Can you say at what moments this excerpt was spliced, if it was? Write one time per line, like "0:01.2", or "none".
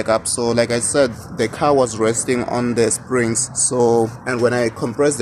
0:04.2